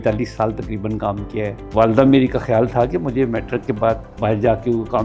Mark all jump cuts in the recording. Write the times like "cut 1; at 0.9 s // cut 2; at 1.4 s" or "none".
cut 1; at 1.7 s // cut 2; at 4.1 s